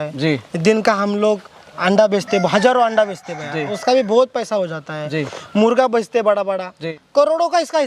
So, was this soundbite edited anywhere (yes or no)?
yes